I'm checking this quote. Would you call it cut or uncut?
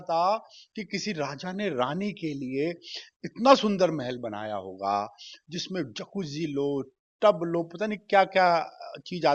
uncut